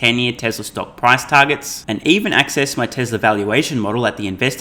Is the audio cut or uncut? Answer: uncut